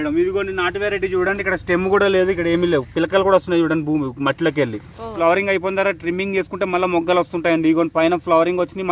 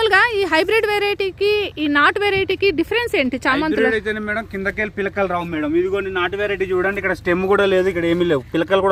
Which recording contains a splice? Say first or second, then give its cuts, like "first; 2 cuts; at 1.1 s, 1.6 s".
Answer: first; 1 cut; at 5.1 s